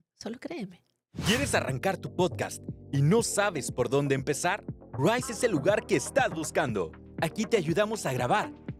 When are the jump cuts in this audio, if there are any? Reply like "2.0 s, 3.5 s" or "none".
none

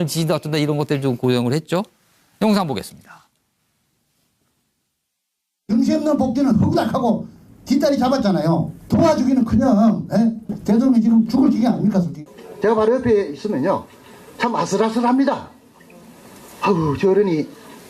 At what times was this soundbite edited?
6.9 s

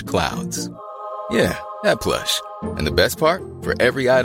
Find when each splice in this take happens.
none

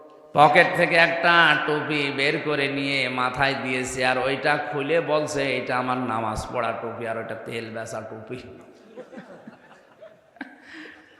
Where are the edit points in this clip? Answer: none

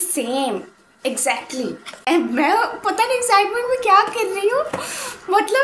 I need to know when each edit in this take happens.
2.1 s

